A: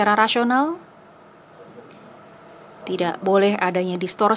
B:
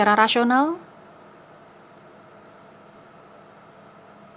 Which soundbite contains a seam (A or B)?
A